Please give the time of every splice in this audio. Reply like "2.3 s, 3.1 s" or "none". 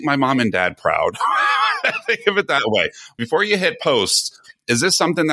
3.2 s